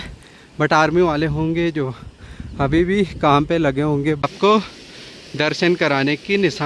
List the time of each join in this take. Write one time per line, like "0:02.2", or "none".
0:04.2